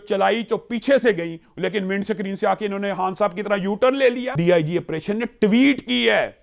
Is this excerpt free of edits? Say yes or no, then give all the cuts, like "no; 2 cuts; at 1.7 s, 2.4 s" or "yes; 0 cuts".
no; 1 cut; at 4.3 s